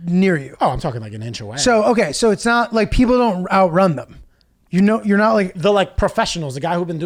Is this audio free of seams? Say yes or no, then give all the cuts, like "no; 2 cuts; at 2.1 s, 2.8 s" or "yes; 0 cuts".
yes; 0 cuts